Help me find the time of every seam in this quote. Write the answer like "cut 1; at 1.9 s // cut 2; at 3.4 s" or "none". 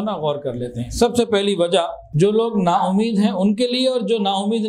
cut 1; at 2.0 s